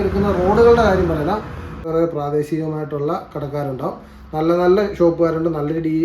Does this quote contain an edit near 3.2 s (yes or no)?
no